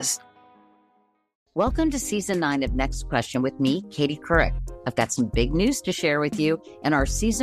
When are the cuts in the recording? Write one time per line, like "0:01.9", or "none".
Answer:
0:01.4